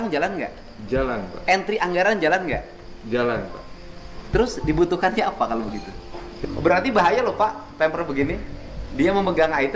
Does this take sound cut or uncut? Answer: cut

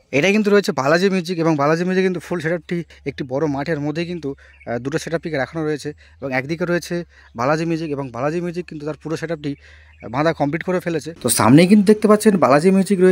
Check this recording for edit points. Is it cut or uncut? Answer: uncut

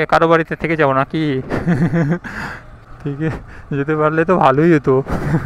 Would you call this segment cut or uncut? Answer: uncut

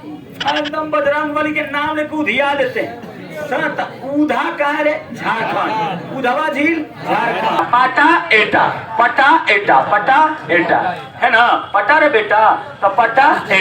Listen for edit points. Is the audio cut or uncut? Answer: cut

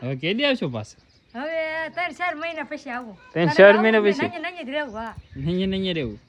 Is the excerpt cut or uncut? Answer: uncut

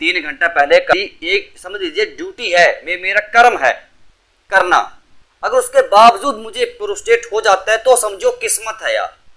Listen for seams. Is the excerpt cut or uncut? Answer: cut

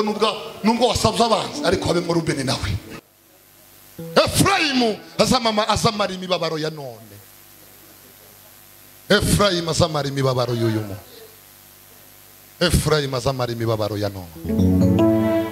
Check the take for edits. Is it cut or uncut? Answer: cut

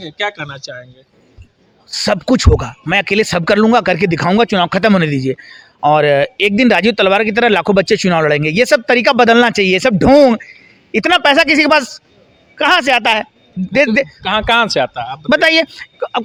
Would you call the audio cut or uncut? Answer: uncut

